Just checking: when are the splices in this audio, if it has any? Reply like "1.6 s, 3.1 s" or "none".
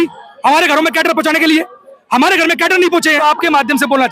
3.2 s